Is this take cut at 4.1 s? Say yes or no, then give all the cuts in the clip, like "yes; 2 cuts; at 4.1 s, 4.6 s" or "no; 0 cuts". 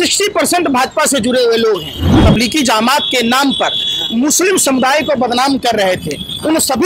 no; 1 cut; at 2.1 s